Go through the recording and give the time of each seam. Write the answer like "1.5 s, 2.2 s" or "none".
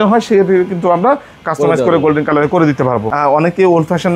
3.1 s